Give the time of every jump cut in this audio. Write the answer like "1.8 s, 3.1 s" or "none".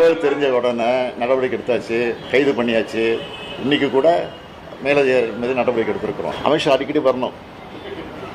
2.2 s, 6.3 s